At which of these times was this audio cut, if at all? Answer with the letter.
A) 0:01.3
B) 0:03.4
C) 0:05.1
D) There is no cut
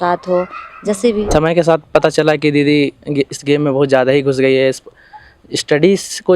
A